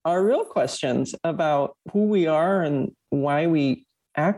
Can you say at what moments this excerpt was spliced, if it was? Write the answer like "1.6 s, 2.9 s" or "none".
1.8 s